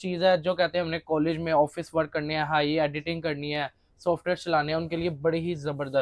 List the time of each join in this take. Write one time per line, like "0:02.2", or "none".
none